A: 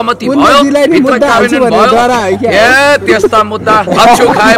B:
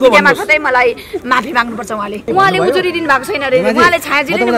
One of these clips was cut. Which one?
B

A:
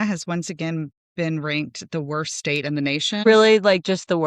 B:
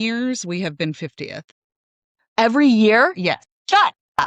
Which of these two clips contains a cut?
A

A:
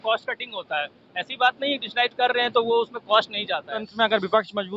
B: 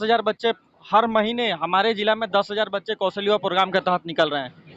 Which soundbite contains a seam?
A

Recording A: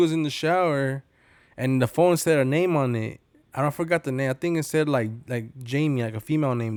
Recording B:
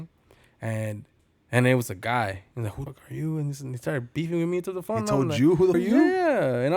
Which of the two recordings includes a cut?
B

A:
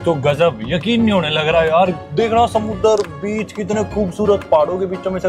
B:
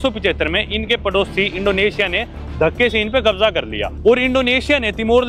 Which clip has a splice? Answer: A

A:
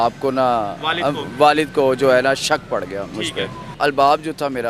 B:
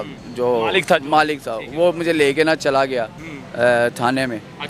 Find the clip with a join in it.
A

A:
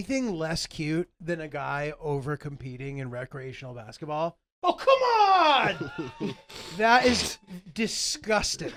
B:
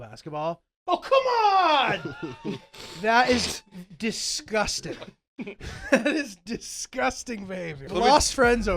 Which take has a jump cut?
B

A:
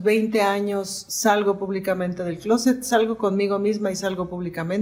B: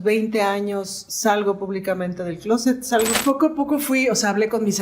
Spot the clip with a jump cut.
B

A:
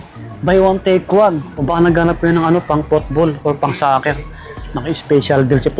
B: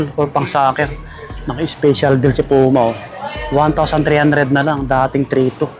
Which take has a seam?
A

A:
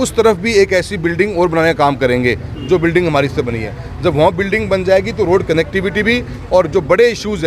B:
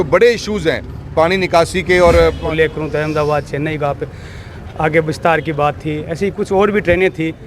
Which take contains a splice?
B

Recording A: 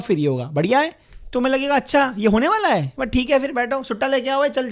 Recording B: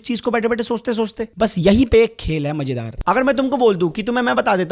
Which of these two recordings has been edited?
B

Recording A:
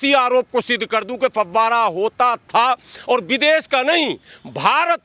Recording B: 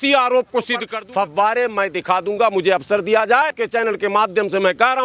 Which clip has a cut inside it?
B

